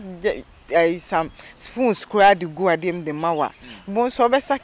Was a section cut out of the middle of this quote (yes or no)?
no